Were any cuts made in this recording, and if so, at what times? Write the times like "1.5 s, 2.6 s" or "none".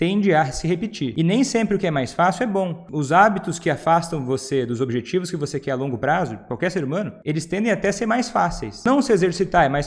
1.1 s, 2.8 s, 7.2 s, 8.7 s